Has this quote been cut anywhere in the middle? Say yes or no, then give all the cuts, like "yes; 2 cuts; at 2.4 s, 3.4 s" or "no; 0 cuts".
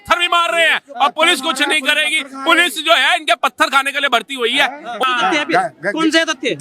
yes; 1 cut; at 5.0 s